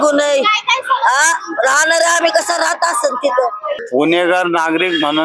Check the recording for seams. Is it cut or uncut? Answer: cut